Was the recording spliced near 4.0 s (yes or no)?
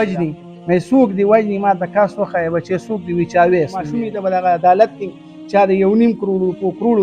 yes